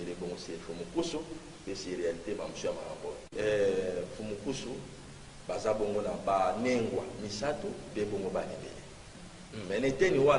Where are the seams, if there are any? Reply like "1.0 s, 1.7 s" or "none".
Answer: 3.3 s